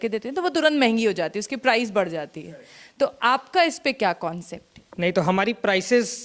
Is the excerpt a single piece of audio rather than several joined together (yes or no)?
yes